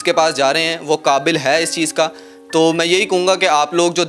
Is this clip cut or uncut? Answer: uncut